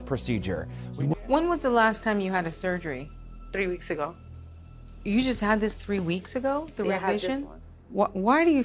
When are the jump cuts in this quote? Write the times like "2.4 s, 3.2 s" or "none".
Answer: 1.1 s

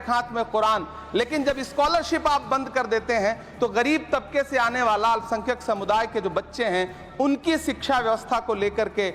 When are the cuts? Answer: none

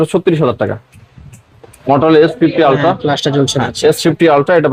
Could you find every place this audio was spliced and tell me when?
none

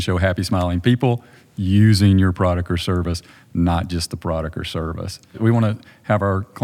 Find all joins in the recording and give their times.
5.3 s

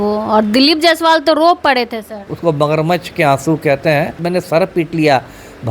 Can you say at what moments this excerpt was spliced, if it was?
2.3 s, 4.2 s

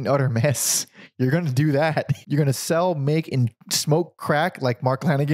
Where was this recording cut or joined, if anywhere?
2.2 s

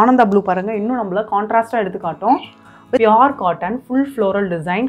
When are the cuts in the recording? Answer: 3.0 s

